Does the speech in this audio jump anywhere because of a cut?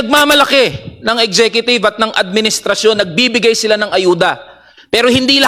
no; 0 cuts

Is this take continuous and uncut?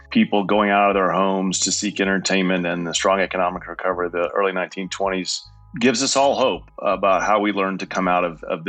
no; 2 cuts; at 5.6 s, 6.7 s

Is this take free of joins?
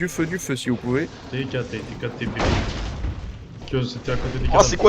no; 1 cut; at 3.6 s

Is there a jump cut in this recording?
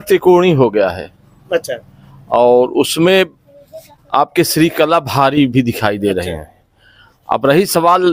no; 0 cuts

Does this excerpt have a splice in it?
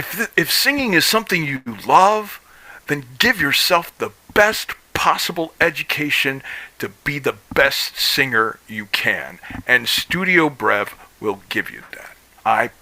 no; 0 cuts

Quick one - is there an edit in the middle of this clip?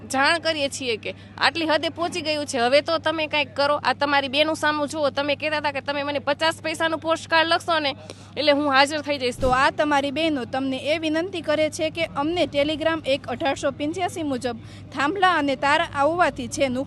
yes; 1 cut; at 9.4 s

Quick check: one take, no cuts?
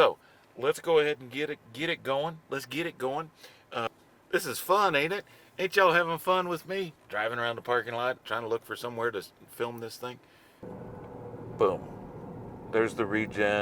no; 2 cuts; at 3.9 s, 10.6 s

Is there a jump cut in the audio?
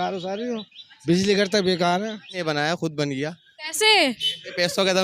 yes; 1 cut; at 2.4 s

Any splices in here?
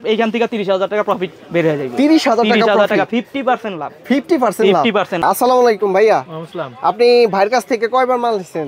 yes; 1 cut; at 5.2 s

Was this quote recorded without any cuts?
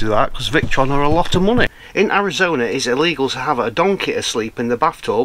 no; 1 cut; at 1.8 s

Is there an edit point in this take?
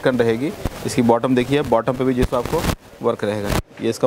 no; 0 cuts

